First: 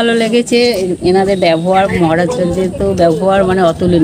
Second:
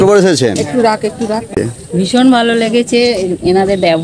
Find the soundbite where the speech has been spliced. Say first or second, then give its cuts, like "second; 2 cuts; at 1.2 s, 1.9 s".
second; 1 cut; at 1.5 s